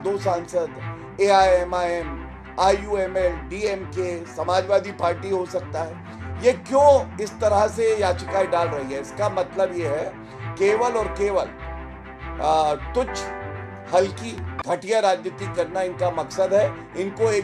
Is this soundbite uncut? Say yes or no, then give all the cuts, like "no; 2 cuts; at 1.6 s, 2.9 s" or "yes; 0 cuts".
yes; 0 cuts